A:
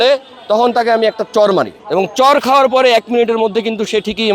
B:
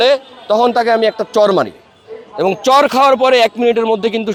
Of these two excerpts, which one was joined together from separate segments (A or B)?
A